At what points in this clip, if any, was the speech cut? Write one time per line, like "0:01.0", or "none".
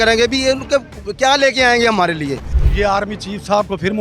0:02.5